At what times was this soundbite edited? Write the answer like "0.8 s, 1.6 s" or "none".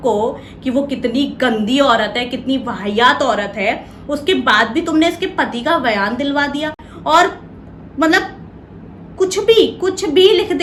none